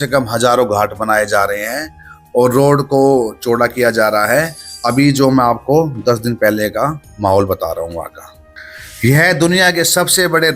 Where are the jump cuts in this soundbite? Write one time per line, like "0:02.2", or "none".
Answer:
none